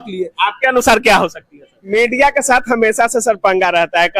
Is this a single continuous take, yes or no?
no